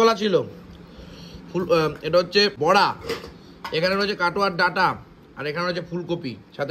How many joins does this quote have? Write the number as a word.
one